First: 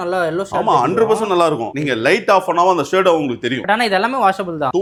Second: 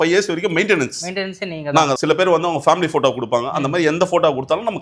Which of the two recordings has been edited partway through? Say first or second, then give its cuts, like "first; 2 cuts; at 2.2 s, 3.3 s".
second; 1 cut; at 2.0 s